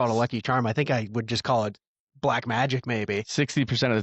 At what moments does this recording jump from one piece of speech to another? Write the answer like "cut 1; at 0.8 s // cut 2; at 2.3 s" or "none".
none